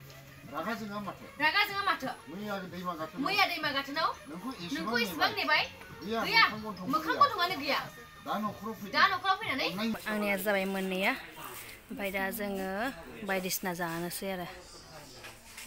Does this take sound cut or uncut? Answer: cut